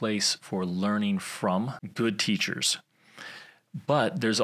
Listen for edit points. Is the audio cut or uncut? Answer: cut